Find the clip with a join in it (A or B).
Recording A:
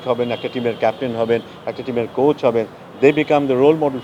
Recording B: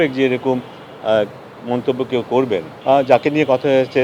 B